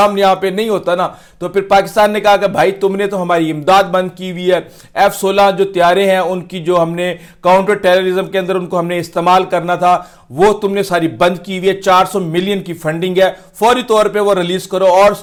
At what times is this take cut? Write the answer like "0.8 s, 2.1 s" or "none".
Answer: none